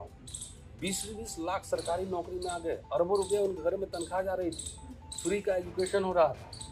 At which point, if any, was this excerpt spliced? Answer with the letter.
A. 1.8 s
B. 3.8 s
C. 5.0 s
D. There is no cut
D